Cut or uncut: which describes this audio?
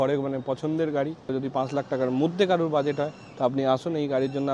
cut